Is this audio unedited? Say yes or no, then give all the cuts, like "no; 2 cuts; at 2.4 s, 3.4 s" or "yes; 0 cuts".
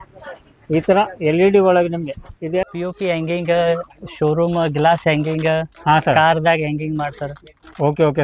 no; 1 cut; at 2.6 s